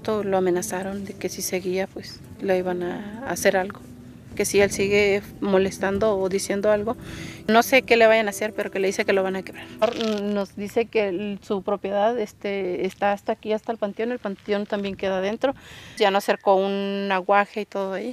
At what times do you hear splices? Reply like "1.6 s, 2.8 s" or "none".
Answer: none